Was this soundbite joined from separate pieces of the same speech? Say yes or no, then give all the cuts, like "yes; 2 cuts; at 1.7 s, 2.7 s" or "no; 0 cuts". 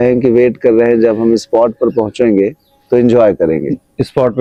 no; 0 cuts